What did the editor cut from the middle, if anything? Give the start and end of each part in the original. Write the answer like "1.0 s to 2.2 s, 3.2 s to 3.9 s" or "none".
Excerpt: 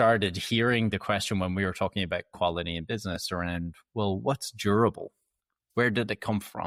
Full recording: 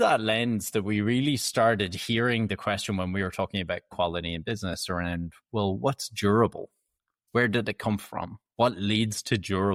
none